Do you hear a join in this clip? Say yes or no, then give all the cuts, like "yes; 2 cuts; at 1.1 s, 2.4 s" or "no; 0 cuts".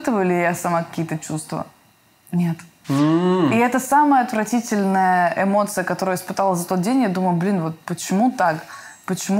no; 0 cuts